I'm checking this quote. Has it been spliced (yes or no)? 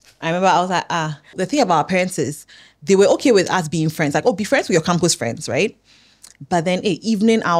yes